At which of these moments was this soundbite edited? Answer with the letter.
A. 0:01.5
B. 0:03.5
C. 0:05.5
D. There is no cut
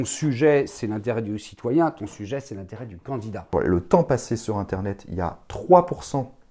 B